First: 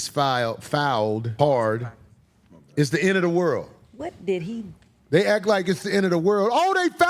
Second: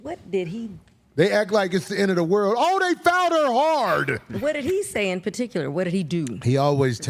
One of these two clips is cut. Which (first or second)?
first